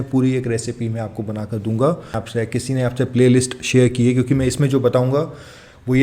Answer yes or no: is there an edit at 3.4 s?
no